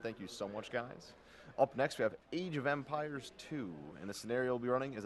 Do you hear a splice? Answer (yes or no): yes